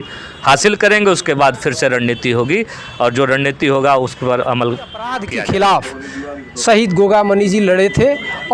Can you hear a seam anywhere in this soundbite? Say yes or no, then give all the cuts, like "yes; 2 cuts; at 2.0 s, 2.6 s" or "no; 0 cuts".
yes; 1 cut; at 5.2 s